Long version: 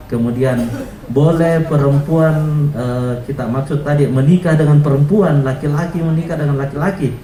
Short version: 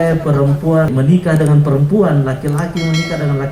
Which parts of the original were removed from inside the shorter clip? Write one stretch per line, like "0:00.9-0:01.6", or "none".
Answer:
0:02.4-0:04.1